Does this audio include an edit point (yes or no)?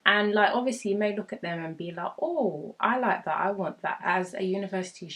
yes